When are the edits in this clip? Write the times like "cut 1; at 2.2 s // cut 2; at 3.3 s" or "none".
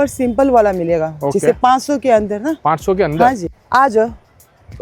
cut 1; at 3.5 s